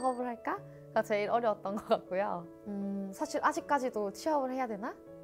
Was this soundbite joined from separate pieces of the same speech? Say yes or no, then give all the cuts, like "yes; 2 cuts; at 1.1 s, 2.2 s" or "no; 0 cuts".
yes; 1 cut; at 2.5 s